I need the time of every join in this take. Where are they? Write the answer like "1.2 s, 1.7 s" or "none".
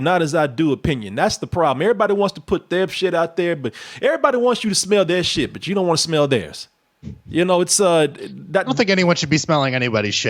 none